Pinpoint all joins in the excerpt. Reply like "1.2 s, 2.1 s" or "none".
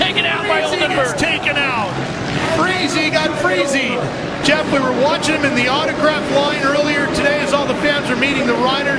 none